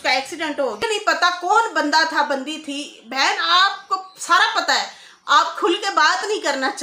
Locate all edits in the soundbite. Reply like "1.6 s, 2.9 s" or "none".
1.0 s